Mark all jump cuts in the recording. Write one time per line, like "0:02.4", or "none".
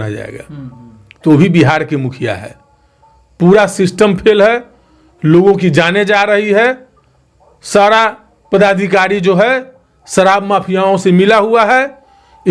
none

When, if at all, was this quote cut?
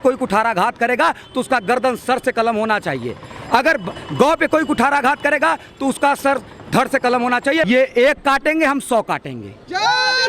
0:07.7

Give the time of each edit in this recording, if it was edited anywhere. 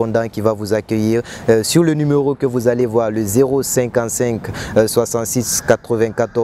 none

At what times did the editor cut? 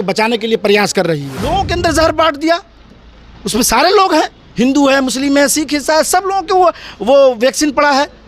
0:01.4

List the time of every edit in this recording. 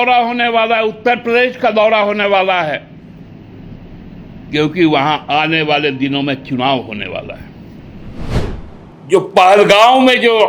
0:08.4

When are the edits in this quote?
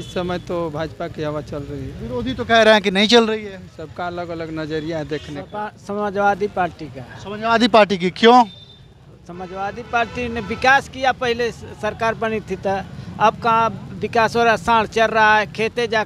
0:05.3

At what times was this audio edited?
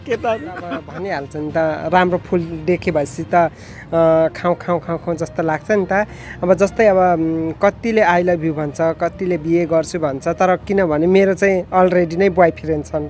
0:01.0

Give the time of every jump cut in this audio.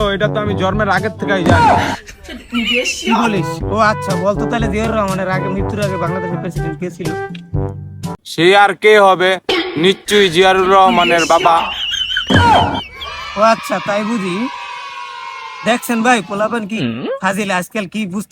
none

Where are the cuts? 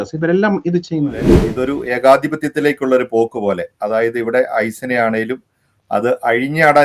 0:01.4

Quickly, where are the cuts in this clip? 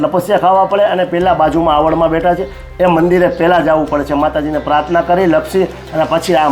none

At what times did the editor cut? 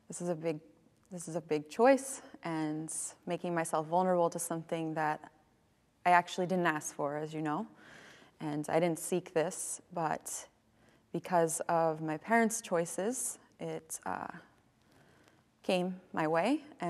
none

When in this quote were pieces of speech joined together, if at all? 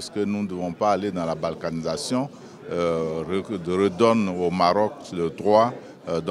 none

